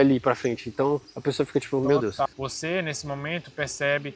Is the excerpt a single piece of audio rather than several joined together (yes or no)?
no